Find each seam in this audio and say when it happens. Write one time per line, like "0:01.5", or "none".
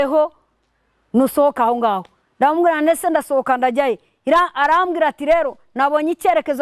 none